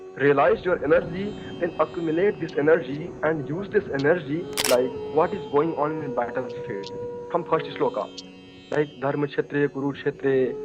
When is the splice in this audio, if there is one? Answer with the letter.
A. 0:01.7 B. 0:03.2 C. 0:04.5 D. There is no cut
C